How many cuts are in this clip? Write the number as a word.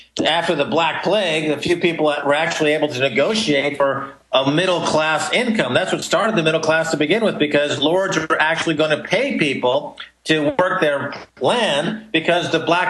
zero